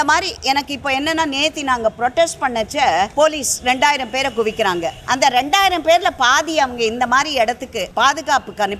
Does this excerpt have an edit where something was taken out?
yes; 3 cuts; at 3.1 s, 5.0 s, 7.8 s

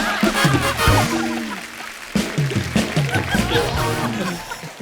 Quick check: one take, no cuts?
yes; 0 cuts

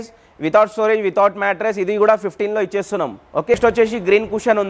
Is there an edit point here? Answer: yes; 1 cut; at 3.5 s

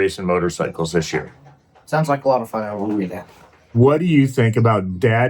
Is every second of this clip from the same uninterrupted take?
no; 1 cut; at 3.1 s

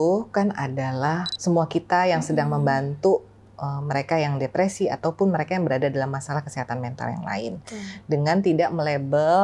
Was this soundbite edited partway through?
yes; 1 cut; at 1.3 s

